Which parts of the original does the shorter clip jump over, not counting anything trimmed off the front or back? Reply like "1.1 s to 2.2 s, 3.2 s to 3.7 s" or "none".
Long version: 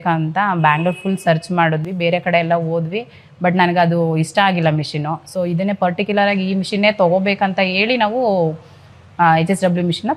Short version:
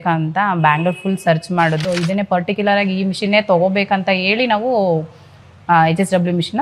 1.8 s to 5.3 s